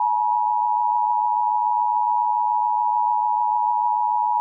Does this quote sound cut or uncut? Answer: uncut